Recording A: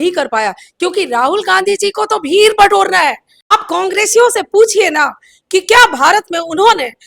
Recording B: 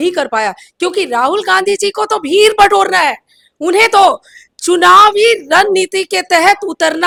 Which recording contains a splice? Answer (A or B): A